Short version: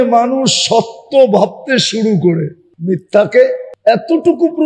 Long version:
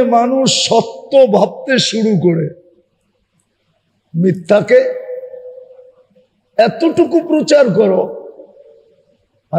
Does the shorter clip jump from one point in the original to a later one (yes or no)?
yes